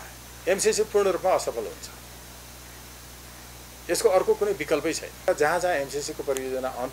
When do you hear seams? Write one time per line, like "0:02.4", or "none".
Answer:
0:05.3

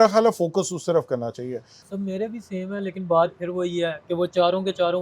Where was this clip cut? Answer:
0:01.8

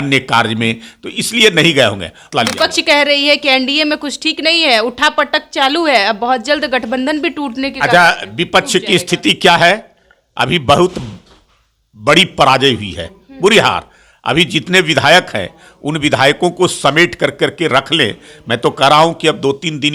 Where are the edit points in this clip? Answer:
0:02.3

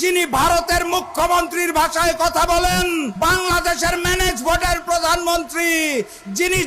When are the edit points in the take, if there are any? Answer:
0:03.1

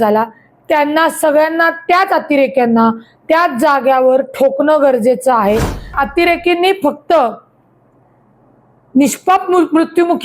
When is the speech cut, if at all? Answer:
0:05.9

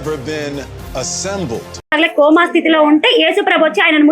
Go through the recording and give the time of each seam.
0:01.9

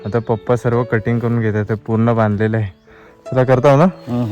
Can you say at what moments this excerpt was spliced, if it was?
none

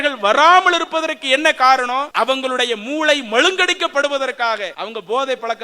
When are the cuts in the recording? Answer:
0:02.1
0:04.8

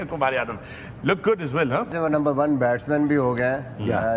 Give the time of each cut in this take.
0:01.9

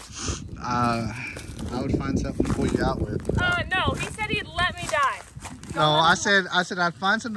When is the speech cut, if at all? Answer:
none

